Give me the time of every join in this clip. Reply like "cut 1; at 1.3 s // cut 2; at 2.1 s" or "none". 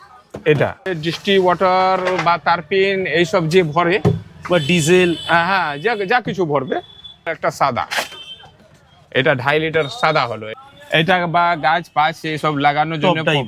cut 1; at 1.0 s // cut 2; at 7.3 s // cut 3; at 10.4 s